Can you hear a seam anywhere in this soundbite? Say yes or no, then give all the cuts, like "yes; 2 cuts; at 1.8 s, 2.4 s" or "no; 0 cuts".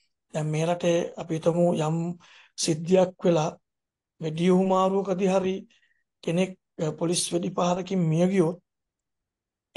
no; 0 cuts